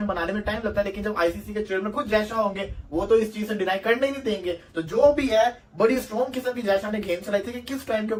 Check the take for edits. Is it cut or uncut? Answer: uncut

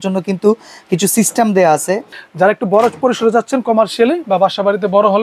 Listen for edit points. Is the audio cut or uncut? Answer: cut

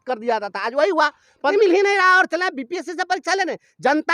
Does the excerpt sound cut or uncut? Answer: cut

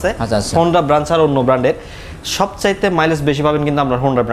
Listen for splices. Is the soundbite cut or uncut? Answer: uncut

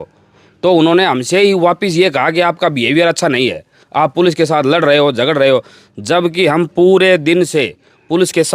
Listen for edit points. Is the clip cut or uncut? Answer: uncut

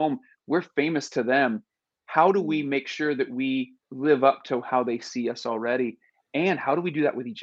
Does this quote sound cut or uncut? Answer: cut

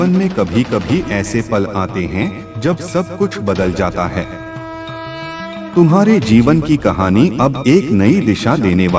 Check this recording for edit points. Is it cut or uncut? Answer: cut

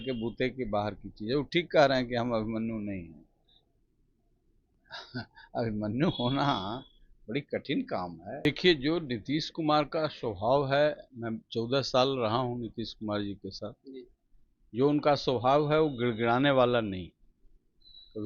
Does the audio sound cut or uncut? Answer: cut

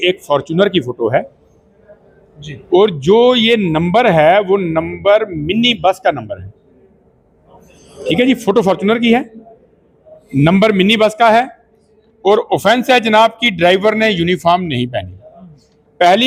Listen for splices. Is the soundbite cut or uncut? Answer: uncut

